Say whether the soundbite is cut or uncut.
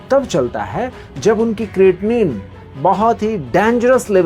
uncut